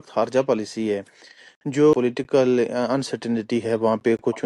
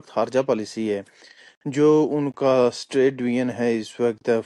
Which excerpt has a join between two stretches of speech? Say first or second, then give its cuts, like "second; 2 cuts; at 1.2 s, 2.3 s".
first; 1 cut; at 1.9 s